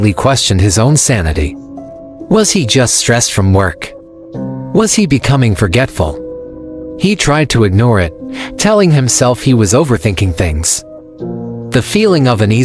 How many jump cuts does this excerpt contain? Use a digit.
0